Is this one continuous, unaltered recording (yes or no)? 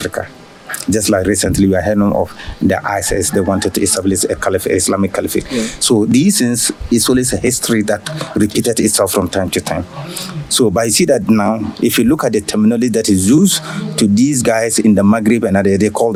yes